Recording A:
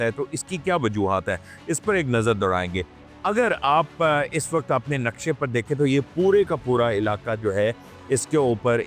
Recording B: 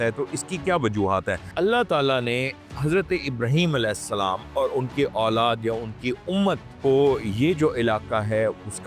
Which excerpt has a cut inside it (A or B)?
B